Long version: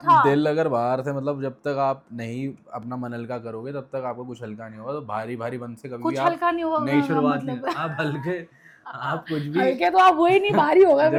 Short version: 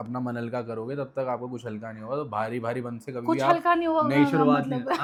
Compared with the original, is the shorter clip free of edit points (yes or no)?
yes